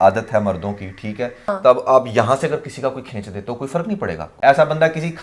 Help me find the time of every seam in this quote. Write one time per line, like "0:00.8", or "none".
0:01.5
0:04.3